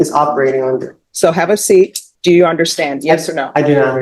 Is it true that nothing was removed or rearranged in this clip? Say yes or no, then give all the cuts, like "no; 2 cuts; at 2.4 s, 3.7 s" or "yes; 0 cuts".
no; 2 cuts; at 1.0 s, 2.1 s